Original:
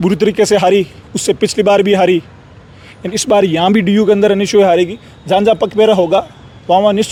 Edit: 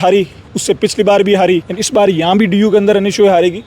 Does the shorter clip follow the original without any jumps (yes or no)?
no